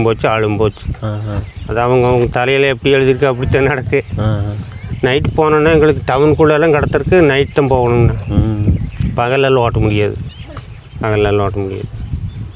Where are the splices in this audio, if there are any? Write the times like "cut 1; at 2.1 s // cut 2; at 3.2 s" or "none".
none